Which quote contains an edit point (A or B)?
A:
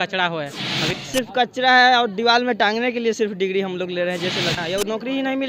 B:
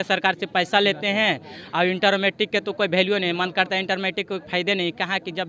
A